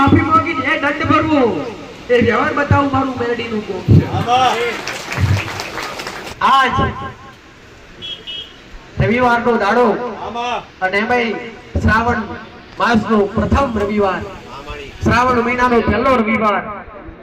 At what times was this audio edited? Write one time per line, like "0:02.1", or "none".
0:06.3